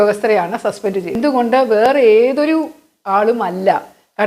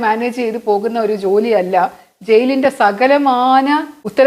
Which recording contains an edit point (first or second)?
first